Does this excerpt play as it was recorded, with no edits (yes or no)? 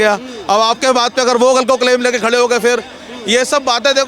yes